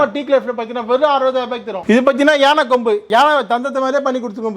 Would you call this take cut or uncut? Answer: cut